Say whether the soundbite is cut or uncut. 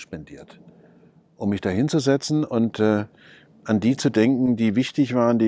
uncut